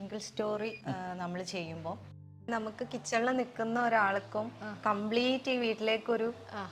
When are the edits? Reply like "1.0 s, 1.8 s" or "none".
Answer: 2.5 s